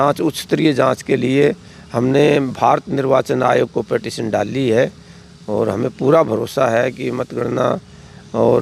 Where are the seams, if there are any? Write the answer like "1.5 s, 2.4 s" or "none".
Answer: none